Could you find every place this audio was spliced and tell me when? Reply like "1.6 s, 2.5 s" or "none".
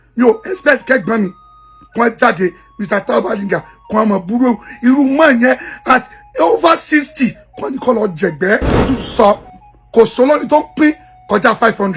8.8 s